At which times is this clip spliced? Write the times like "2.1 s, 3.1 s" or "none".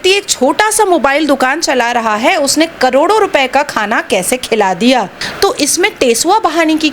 5.2 s